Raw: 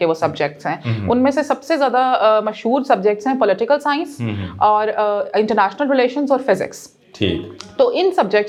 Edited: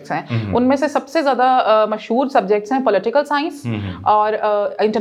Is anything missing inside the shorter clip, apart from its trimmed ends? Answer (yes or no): no